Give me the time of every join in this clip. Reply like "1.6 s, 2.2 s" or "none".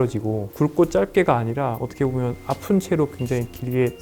none